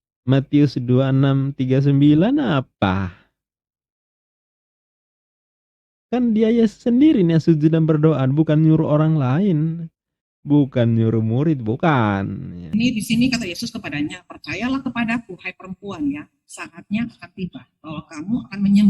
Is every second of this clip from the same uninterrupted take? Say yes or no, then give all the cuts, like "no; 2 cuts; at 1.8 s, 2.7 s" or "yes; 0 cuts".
no; 1 cut; at 12.6 s